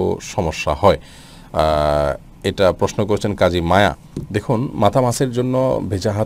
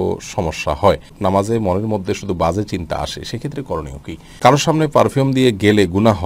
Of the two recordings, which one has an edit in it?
second; 2 cuts; at 1.1 s, 4.4 s

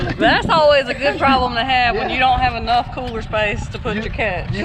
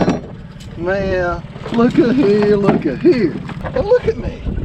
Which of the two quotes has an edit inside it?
second; 1 cut; at 3.5 s

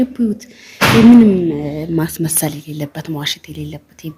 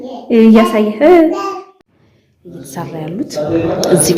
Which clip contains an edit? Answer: second; 1 cut; at 1.9 s

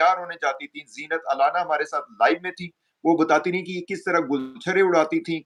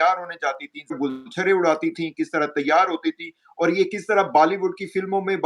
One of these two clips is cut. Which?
second; 1 cut; at 1.0 s

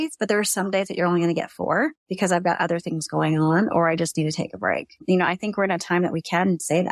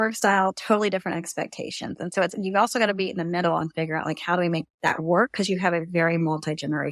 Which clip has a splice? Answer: first; 2 cuts; at 2.0 s, 5.0 s

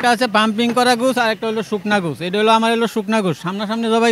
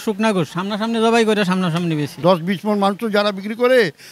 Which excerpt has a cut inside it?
second; 1 cut; at 2.2 s

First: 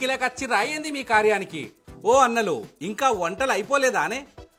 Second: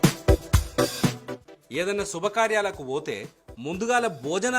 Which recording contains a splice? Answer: second; 1 cut; at 1.1 s

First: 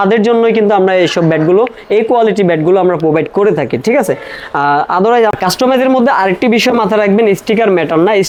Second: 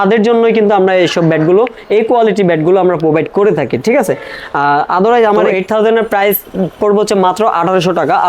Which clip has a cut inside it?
second; 1 cut; at 5.3 s

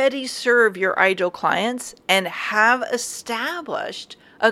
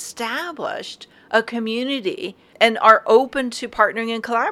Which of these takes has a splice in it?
second; 1 cut; at 2.5 s

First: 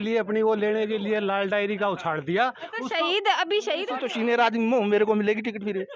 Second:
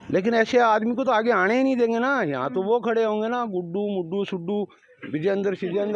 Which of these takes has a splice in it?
first; 1 cut; at 4.0 s

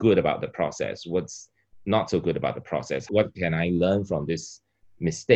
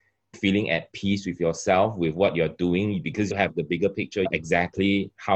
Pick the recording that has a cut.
second; 2 cuts; at 3.3 s, 4.3 s

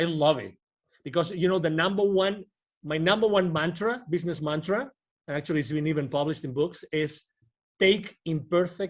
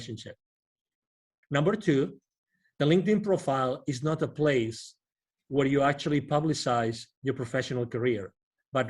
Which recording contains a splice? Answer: second; 1 cut; at 1.3 s

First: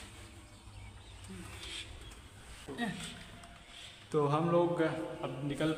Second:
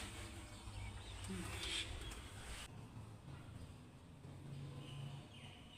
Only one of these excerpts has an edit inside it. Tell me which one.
second; 1 cut; at 2.7 s

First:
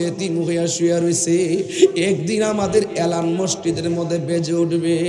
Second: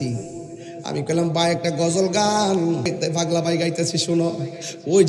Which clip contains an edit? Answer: second; 1 cut; at 2.9 s

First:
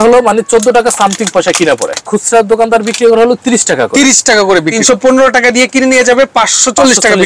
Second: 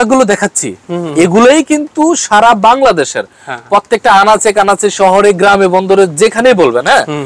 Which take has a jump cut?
first; 2 cuts; at 2.0 s, 4.7 s

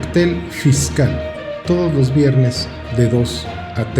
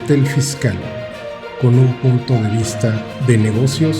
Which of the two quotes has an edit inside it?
first; 1 cut; at 1.3 s

